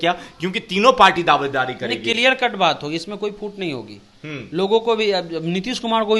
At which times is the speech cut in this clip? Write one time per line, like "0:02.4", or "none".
none